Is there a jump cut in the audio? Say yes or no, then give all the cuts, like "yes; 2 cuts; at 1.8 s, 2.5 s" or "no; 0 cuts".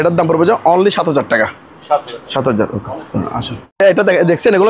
no; 0 cuts